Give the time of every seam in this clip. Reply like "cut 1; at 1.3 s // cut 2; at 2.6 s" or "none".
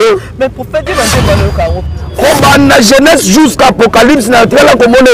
cut 1; at 1.8 s